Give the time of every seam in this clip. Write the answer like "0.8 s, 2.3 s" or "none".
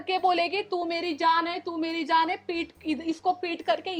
none